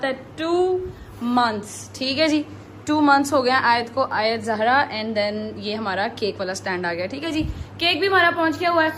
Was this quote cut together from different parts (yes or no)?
no